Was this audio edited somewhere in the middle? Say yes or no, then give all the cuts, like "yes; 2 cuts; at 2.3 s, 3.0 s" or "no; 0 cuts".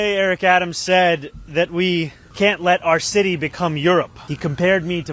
yes; 2 cuts; at 2.2 s, 4.2 s